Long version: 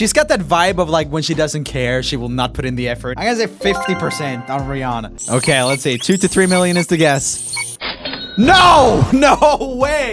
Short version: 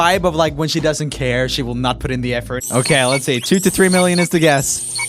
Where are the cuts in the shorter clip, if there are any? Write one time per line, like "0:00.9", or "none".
0:02.6